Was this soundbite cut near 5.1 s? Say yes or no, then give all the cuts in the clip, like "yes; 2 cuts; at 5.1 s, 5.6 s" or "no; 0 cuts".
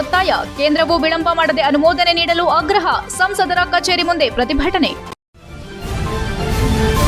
yes; 1 cut; at 5.1 s